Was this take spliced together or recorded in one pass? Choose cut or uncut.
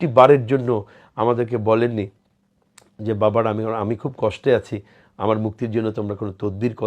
uncut